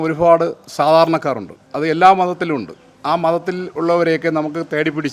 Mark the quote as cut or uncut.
uncut